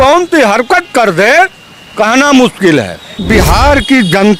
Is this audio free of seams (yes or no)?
no